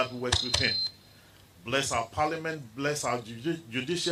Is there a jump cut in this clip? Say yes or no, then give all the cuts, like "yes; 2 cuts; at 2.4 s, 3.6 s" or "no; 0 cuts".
no; 0 cuts